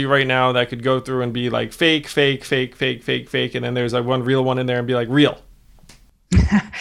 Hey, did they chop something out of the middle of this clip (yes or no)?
no